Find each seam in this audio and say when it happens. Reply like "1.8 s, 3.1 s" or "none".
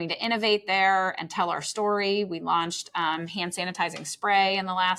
none